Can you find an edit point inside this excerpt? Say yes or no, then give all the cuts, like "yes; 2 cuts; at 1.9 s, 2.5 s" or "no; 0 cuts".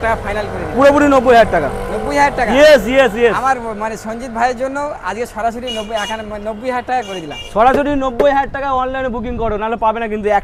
no; 0 cuts